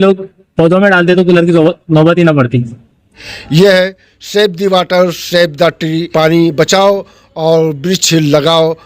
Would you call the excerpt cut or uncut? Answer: cut